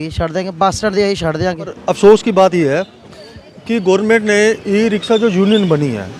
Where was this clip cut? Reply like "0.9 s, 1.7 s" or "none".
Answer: 1.8 s